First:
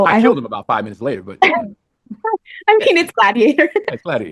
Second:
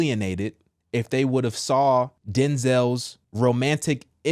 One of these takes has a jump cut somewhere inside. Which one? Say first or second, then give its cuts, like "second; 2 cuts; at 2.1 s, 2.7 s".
second; 2 cuts; at 2.2 s, 3.2 s